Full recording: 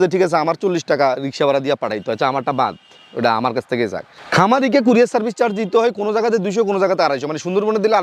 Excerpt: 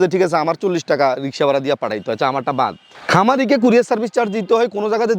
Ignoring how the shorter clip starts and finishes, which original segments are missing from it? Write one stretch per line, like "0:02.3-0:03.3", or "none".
0:02.9-0:04.1